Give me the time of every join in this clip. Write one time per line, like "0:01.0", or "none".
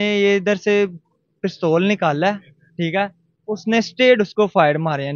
none